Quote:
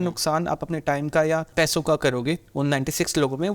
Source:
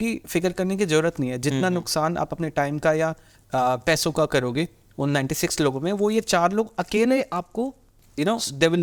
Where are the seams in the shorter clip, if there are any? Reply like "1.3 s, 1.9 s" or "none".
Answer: 1.5 s, 2.5 s